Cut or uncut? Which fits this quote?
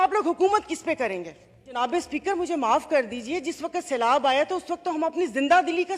cut